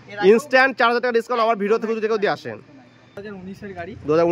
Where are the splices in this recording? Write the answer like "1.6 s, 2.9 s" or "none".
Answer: 3.2 s

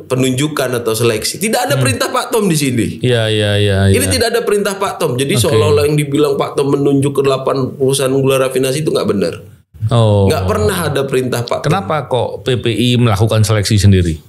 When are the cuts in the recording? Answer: none

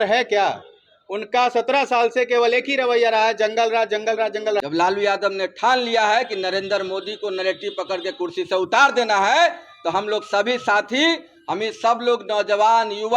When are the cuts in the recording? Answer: 4.6 s

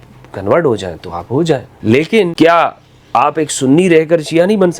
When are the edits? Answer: 1.7 s, 2.3 s

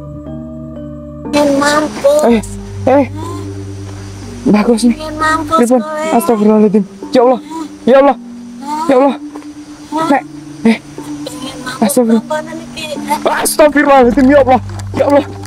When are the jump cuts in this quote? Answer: 1.3 s

